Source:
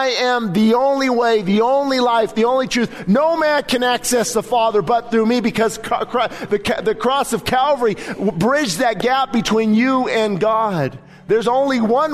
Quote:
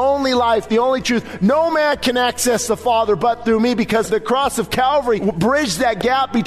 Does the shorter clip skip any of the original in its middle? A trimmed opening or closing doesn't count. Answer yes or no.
yes